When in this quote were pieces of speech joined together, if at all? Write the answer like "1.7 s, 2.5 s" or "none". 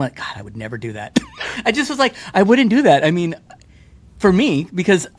none